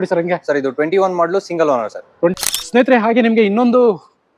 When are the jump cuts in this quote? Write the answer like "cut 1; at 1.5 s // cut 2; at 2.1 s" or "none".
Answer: cut 1; at 2.3 s

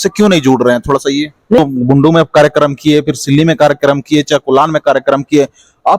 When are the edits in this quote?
cut 1; at 1.6 s

